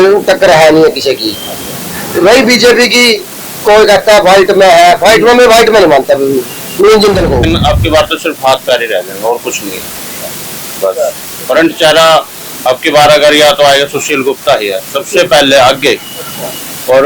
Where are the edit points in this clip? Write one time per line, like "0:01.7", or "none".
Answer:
0:07.4